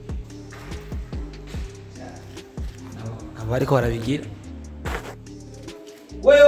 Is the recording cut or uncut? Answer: cut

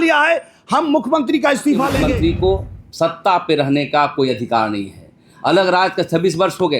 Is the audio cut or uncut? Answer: cut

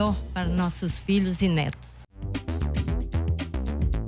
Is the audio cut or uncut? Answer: cut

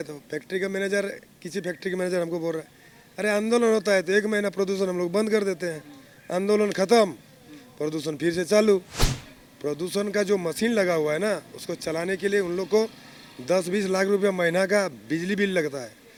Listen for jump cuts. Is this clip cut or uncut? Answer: uncut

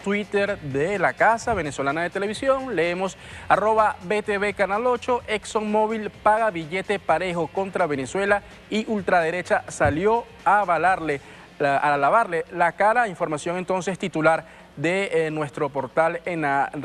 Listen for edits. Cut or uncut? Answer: uncut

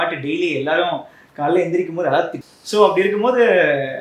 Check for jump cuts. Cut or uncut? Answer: cut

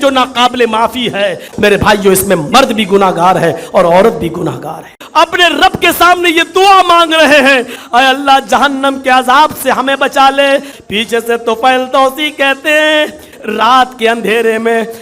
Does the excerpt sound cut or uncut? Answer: cut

